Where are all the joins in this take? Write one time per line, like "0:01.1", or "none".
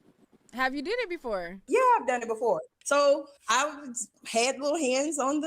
0:01.6
0:02.7